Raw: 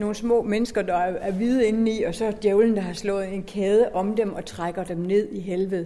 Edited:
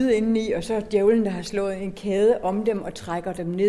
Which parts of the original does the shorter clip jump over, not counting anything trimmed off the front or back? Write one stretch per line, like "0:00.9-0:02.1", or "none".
none